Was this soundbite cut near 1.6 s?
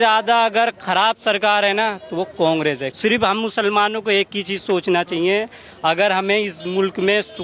no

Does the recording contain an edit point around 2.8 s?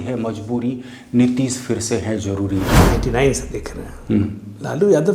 yes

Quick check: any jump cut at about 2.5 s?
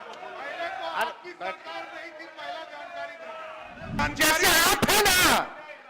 no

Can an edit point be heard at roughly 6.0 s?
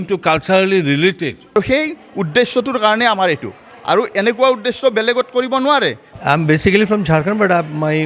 yes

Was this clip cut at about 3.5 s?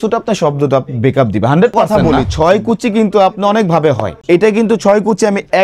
no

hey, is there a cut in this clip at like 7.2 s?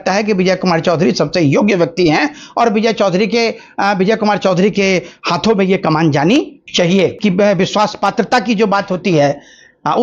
yes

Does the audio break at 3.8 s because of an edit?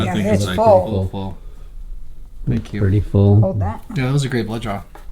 yes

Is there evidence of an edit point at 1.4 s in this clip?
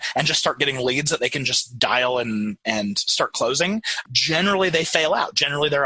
no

